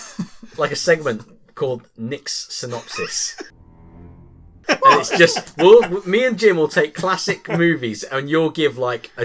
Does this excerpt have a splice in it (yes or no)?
no